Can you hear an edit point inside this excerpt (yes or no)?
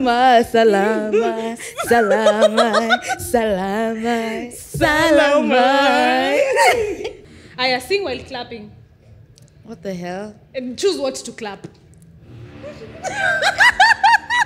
yes